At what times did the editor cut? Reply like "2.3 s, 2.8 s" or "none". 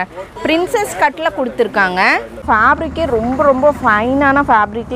2.4 s